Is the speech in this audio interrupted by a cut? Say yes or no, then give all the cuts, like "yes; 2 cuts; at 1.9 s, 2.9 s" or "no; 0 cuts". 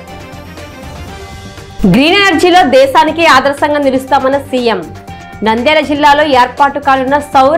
yes; 1 cut; at 1.8 s